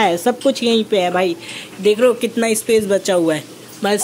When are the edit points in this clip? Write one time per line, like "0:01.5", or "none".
none